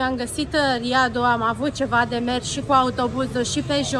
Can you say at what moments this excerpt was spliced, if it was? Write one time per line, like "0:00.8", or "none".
none